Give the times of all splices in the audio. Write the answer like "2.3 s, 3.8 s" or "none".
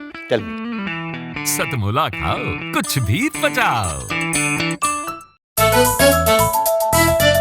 5.4 s